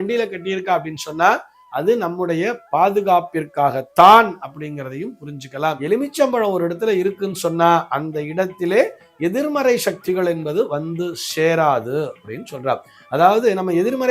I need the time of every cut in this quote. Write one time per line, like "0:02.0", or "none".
0:05.8